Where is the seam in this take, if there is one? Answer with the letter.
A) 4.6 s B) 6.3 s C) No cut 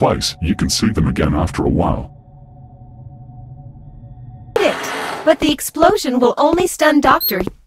A